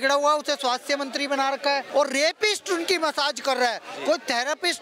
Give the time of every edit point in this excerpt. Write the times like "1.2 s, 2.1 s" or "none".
1.9 s